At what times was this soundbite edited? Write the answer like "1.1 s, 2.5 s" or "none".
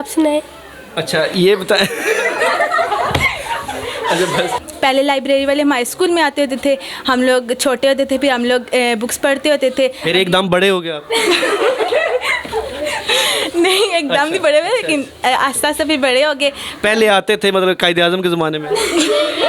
4.6 s